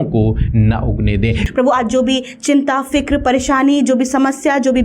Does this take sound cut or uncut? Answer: cut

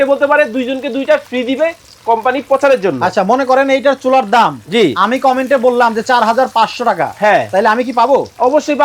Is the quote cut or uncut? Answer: uncut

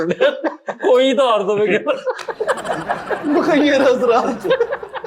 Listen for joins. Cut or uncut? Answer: uncut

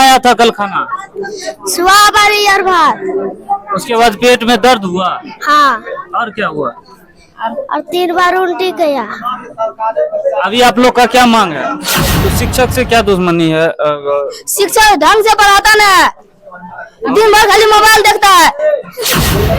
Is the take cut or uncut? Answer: cut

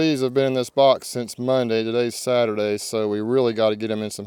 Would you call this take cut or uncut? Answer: uncut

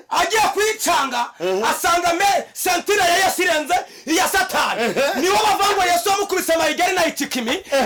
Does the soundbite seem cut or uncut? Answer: uncut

